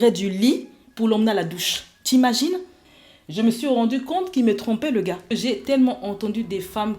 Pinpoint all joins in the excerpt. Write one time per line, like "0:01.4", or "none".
0:02.8
0:05.3